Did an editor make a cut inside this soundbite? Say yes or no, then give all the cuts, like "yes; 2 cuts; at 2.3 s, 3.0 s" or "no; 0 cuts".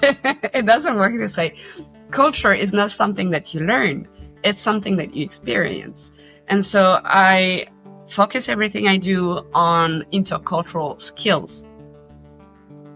no; 0 cuts